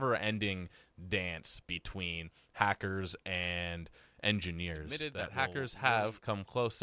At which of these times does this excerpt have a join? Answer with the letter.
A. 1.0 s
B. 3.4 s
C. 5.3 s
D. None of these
C